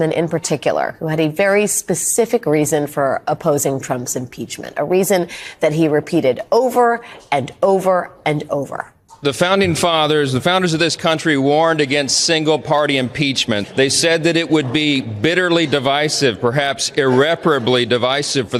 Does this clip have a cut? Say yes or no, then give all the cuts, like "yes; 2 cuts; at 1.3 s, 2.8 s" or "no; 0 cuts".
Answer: no; 0 cuts